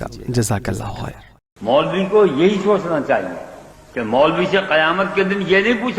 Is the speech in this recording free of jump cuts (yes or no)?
no